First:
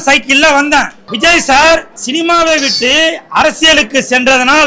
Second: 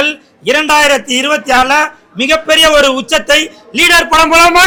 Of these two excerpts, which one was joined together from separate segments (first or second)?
first